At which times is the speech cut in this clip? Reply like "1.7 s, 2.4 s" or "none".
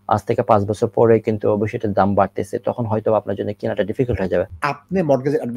4.5 s